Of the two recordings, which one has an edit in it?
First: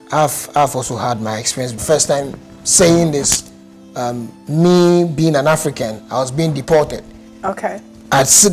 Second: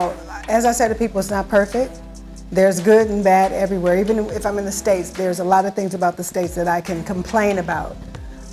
first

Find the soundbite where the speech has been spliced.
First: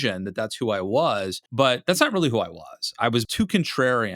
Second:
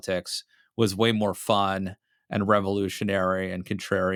first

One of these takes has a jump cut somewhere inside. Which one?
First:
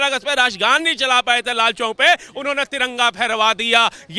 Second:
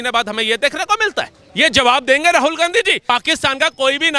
second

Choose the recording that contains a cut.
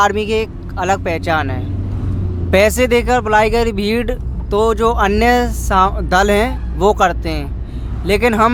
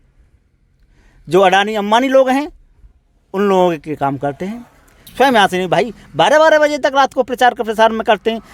second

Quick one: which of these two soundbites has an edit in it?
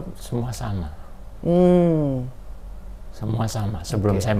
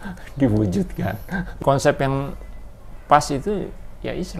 second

